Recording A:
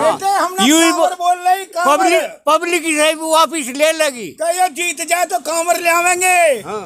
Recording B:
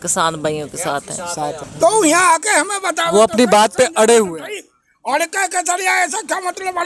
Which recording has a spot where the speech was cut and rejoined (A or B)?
B